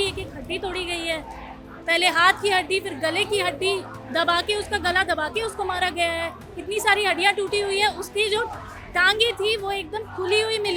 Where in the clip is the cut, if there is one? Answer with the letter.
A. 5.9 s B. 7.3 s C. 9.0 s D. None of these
D